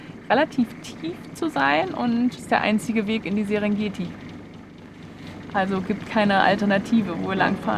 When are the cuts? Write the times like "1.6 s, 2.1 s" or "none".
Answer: 2.4 s